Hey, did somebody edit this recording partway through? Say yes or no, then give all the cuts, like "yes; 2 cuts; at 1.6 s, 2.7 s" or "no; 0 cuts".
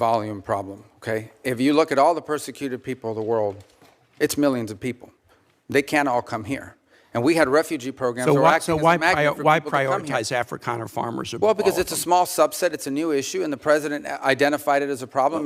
no; 0 cuts